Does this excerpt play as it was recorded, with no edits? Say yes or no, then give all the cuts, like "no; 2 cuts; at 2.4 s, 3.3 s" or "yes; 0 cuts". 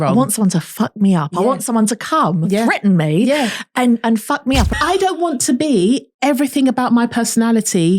no; 1 cut; at 4.7 s